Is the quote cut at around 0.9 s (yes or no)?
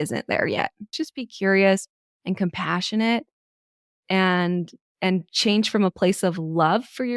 yes